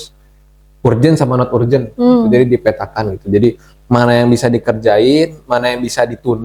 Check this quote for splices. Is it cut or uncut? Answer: uncut